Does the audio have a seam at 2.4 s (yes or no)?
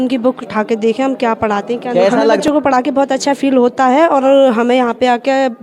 yes